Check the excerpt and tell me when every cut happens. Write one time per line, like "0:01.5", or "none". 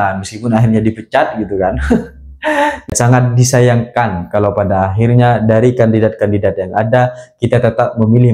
0:02.9

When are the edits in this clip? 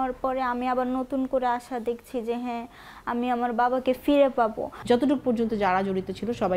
0:04.7

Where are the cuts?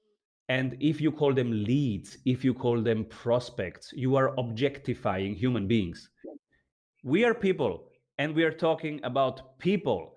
0:06.6

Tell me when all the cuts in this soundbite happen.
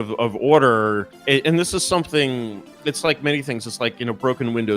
0:01.1

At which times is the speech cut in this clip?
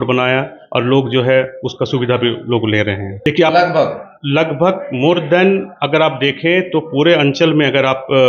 0:03.1

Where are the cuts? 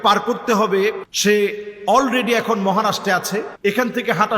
0:01.1
0:03.5

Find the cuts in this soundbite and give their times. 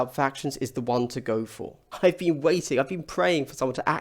0:01.8

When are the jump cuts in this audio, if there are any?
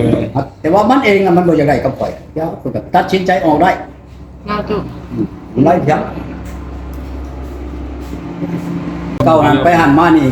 0:09.2

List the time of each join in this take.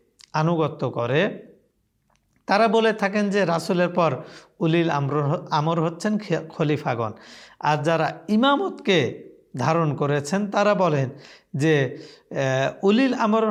none

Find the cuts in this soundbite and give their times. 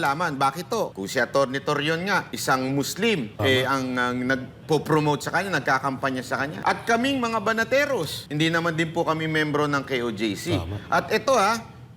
0:01.0
0:02.3
0:03.3
0:06.5
0:08.2

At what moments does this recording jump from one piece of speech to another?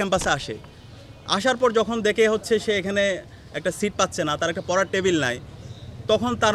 none

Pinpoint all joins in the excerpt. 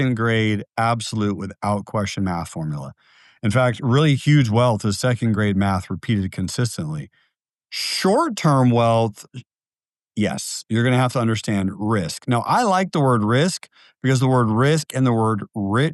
none

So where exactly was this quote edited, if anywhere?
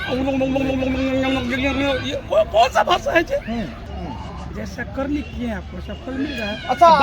0:03.9

